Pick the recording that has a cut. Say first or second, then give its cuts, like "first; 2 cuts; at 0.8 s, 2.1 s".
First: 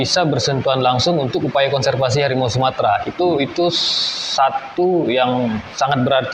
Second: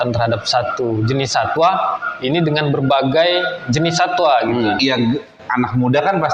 second; 1 cut; at 4.8 s